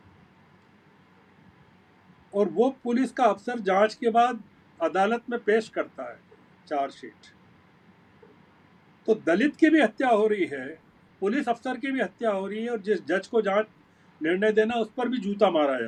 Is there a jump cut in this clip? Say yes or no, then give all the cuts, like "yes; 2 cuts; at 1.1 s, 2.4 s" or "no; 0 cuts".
no; 0 cuts